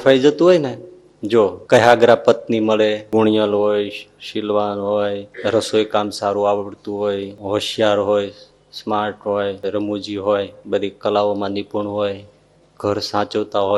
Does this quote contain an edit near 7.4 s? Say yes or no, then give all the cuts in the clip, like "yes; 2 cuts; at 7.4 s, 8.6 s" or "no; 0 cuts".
yes; 6 cuts; at 1.6 s, 3.0 s, 5.3 s, 7.4 s, 9.6 s, 10.6 s